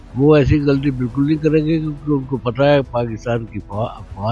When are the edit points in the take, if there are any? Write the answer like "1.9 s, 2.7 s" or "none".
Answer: none